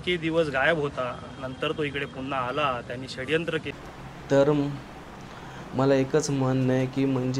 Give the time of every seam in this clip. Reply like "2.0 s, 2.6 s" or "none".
3.7 s